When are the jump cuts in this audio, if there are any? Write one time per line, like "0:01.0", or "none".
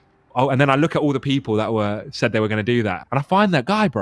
0:03.0